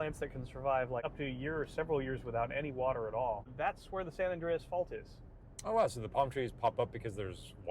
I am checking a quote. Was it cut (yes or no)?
yes